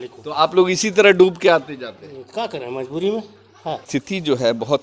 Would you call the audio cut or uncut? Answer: cut